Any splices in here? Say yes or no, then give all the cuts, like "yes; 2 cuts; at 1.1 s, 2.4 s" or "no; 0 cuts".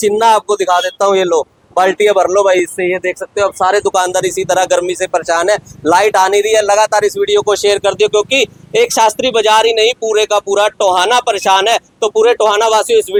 no; 0 cuts